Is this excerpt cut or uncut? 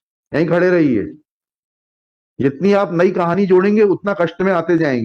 uncut